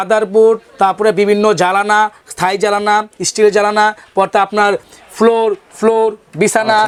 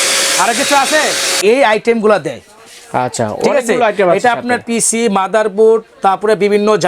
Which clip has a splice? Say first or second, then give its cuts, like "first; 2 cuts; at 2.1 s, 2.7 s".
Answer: second; 1 cut; at 1.4 s